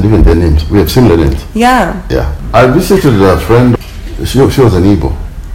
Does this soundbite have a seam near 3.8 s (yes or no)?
yes